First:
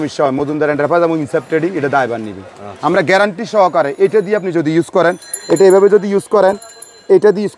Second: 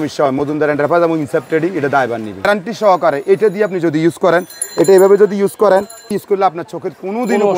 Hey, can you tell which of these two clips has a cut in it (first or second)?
second